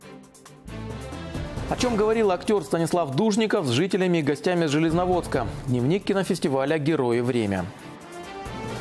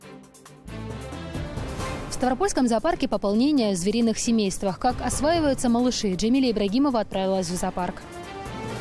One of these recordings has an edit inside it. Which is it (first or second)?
second